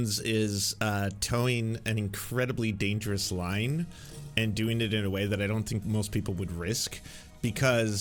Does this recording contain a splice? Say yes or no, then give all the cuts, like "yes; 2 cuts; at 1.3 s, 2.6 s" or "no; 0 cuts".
no; 0 cuts